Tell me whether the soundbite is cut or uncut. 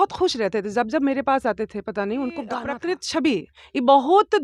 cut